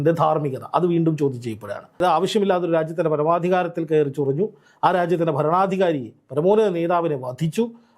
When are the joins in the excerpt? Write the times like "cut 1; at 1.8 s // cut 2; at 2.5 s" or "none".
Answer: cut 1; at 2.0 s